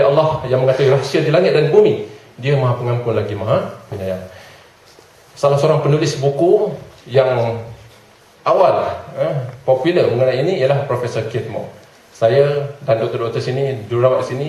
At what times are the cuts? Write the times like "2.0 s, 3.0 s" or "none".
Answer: none